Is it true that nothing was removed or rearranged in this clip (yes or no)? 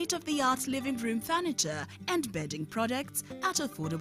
yes